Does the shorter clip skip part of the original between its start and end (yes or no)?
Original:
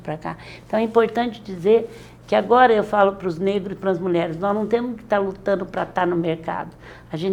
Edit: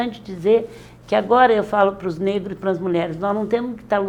no